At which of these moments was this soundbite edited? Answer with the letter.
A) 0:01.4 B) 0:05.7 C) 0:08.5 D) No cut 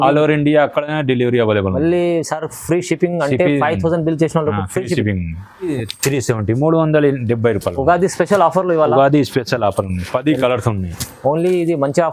B